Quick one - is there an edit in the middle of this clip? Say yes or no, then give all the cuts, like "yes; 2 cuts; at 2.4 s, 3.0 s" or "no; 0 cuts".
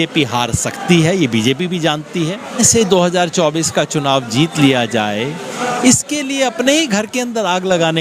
yes; 1 cut; at 2.6 s